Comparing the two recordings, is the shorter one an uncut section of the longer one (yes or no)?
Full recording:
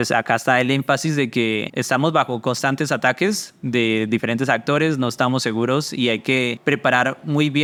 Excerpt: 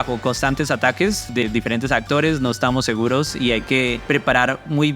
no